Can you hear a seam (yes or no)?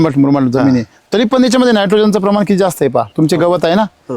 yes